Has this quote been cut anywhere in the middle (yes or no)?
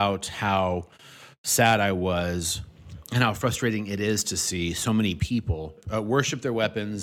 yes